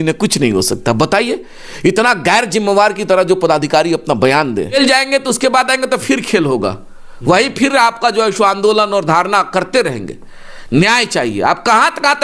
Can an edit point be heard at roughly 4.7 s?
yes; 1 cut; at 4.7 s

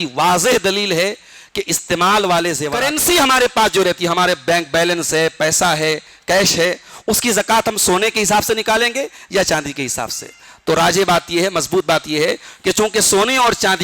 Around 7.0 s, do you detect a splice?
no; 1 cut; at 2.7 s

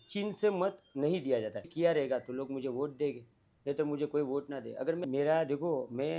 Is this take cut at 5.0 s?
yes; 2 cuts; at 1.7 s, 5.0 s

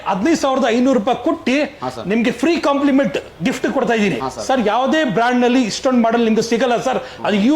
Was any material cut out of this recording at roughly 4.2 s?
yes; 1 cut; at 4.2 s

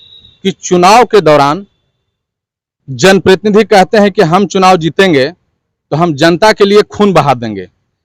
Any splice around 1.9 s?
no; 0 cuts

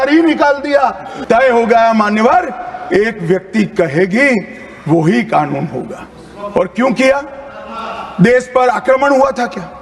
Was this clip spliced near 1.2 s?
yes; 1 cut; at 1.2 s

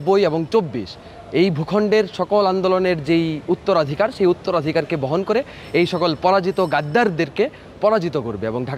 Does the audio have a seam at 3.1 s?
no; 0 cuts

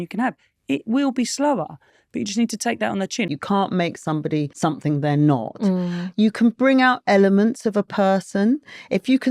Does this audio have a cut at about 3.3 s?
yes; 2 cuts; at 3.3 s, 4.5 s

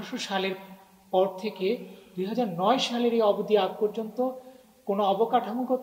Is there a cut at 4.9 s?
no; 0 cuts

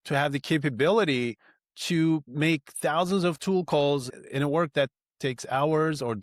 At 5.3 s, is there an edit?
no; 2 cuts; at 2.3 s, 4.1 s

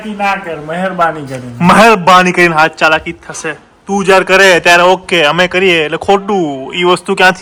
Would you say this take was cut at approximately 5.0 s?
no; 0 cuts

